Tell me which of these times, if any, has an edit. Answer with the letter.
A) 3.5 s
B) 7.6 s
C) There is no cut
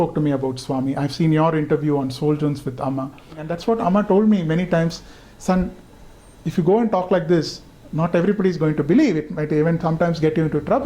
A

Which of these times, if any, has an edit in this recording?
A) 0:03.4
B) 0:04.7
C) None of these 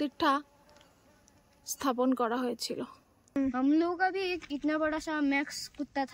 A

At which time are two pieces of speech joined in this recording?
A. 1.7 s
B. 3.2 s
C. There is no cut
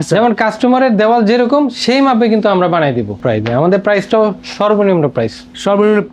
B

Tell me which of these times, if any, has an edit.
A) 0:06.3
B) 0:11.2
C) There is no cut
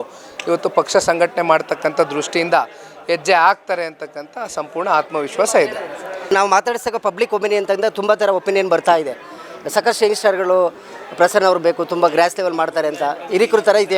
A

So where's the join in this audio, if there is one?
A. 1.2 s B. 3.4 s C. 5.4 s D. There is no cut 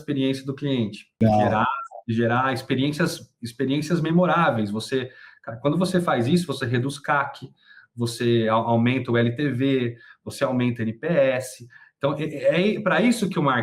A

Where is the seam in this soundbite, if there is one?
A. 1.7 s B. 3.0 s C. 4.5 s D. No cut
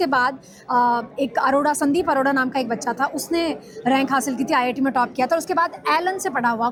D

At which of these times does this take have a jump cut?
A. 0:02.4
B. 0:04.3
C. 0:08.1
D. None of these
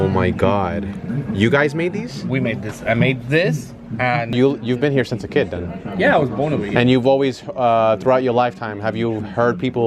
B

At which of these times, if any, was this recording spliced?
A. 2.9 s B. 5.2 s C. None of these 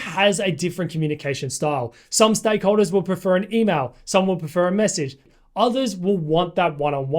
B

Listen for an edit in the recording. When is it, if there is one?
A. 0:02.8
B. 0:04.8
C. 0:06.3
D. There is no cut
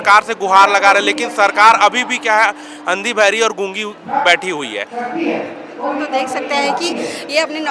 D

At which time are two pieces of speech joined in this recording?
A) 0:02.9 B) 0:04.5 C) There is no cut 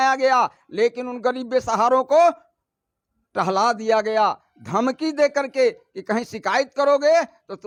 C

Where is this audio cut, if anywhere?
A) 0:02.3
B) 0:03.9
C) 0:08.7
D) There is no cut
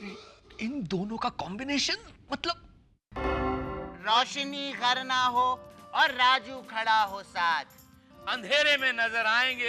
B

